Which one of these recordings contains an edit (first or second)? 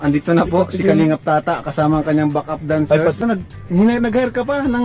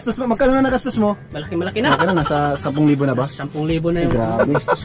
first